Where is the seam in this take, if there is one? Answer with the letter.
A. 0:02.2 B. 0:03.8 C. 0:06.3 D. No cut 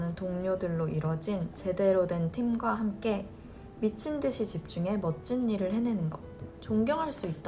C